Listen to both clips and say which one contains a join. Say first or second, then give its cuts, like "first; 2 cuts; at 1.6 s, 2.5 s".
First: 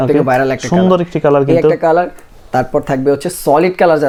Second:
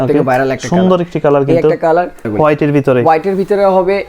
second; 1 cut; at 2.3 s